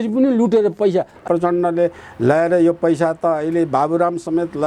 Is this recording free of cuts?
no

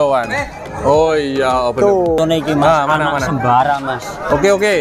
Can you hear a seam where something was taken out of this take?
yes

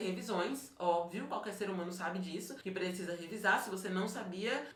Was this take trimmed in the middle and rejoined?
no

